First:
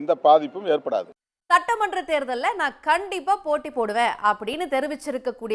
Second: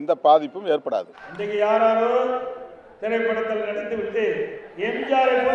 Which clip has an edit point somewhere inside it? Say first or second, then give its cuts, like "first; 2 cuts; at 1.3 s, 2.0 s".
second; 1 cut; at 1.3 s